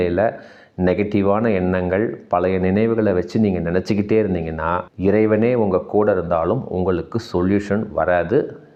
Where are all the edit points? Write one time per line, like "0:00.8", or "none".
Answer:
none